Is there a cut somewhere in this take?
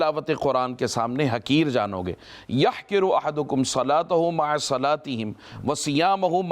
no; 0 cuts

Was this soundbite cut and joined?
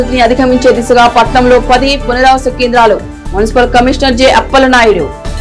no; 0 cuts

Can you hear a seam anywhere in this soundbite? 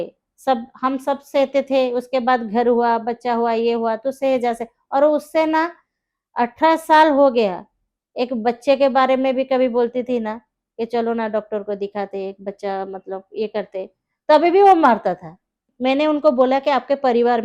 yes; 1 cut; at 15.7 s

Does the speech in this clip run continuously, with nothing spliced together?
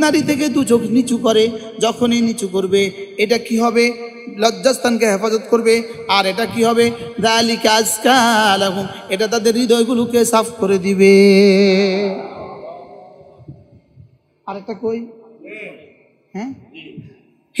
yes; 0 cuts

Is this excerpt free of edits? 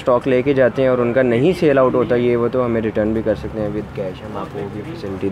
yes; 0 cuts

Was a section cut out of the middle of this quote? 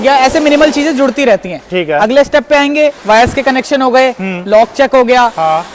no; 0 cuts

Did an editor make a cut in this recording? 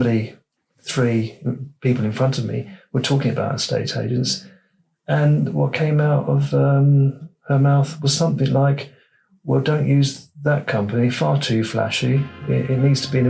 no; 0 cuts

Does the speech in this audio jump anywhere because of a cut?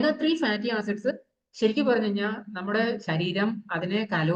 no; 0 cuts

